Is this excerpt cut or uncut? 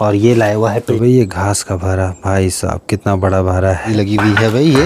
cut